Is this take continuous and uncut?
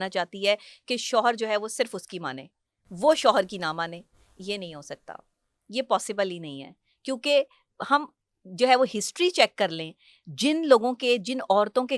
yes; 0 cuts

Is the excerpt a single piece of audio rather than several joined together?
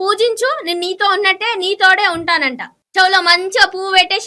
yes; 0 cuts

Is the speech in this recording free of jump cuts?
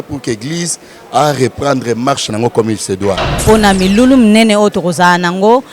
no; 1 cut; at 3.3 s

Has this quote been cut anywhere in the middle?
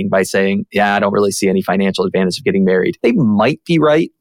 yes; 1 cut; at 2.9 s

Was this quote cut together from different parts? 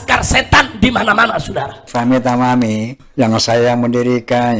yes; 2 cuts; at 1.9 s, 3.0 s

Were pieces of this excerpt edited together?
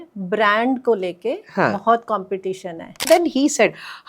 yes; 1 cut; at 3.0 s

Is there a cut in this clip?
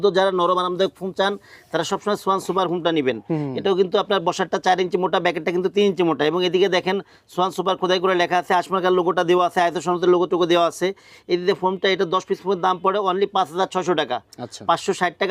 no; 0 cuts

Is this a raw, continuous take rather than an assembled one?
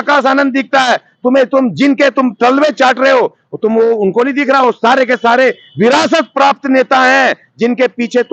yes; 0 cuts

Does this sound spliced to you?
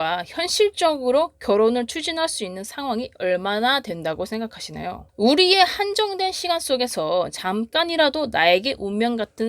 no; 0 cuts

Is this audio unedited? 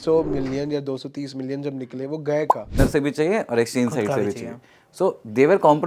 no; 1 cut; at 2.8 s

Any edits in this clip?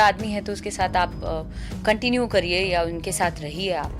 no; 0 cuts

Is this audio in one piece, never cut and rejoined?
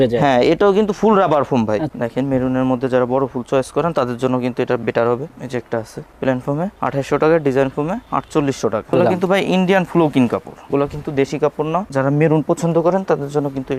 no; 4 cuts; at 1.9 s, 5.3 s, 8.9 s, 11.9 s

